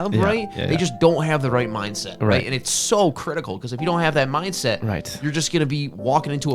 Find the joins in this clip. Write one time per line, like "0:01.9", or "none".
none